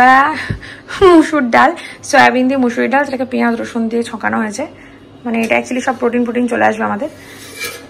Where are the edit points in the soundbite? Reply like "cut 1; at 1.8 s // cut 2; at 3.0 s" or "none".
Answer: none